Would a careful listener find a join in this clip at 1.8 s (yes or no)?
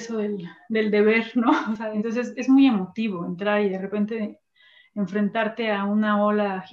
yes